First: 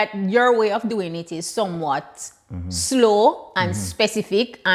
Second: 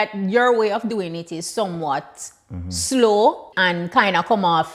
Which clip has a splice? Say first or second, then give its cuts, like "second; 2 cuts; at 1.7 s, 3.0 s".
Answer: second; 1 cut; at 3.5 s